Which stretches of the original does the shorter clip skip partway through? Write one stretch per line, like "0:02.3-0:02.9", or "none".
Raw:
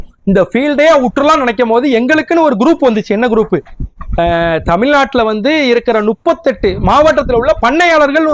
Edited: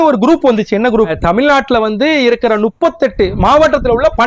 0:03.5-0:04.5